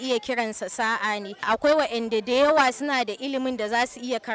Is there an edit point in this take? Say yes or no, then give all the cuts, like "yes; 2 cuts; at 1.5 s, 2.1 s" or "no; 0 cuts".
yes; 1 cut; at 1.5 s